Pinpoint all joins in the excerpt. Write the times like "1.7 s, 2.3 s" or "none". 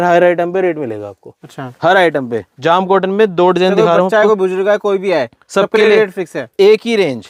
none